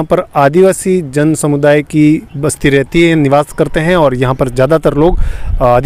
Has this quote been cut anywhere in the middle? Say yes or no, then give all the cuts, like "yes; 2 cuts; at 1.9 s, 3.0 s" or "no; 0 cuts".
no; 0 cuts